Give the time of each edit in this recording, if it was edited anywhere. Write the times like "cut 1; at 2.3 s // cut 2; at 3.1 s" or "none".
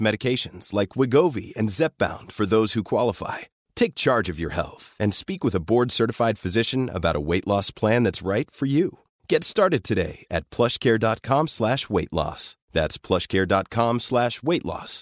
none